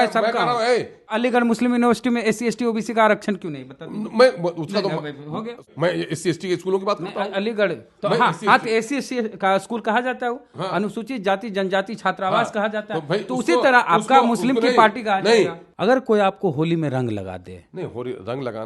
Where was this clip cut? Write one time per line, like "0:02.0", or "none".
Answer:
0:01.2
0:05.7
0:15.6